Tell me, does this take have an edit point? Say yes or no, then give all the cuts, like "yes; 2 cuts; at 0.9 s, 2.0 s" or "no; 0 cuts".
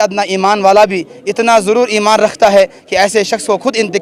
no; 0 cuts